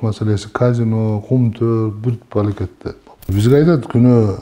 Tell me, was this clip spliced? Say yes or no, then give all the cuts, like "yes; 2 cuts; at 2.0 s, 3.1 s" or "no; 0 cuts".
yes; 1 cut; at 3.3 s